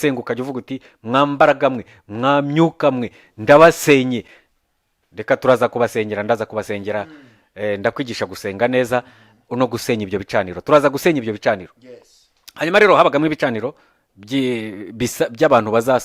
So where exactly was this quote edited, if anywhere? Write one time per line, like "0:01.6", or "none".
none